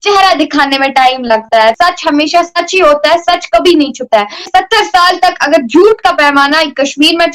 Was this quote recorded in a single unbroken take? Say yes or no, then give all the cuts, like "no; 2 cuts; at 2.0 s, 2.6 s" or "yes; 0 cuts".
yes; 0 cuts